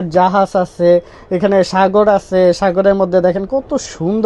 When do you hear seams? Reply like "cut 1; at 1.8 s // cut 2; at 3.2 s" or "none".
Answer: none